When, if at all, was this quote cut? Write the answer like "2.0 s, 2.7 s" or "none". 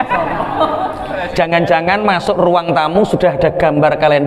none